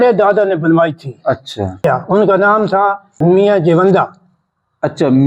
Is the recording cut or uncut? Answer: cut